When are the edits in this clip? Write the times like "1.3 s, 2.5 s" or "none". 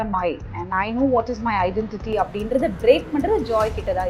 none